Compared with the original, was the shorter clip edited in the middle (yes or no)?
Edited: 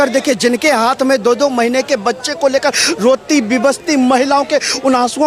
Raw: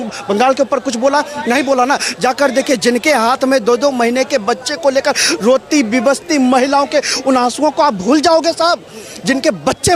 no